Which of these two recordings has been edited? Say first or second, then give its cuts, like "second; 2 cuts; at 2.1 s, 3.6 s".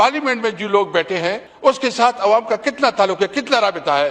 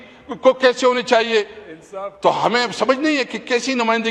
first; 1 cut; at 1.5 s